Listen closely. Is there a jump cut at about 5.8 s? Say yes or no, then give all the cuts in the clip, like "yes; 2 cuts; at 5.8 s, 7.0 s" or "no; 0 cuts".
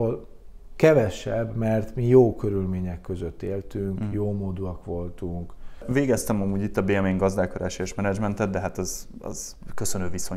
yes; 1 cut; at 5.8 s